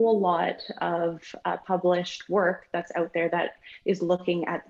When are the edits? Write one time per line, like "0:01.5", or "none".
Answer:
none